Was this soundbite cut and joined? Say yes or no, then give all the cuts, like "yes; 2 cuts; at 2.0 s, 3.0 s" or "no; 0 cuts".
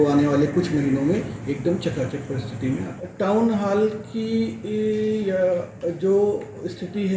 yes; 1 cut; at 3.0 s